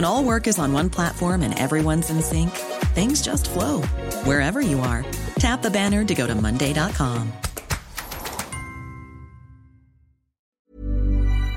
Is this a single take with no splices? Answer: no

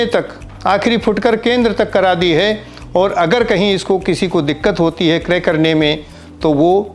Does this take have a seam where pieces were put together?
no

